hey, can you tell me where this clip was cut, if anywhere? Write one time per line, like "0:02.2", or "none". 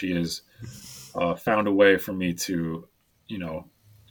none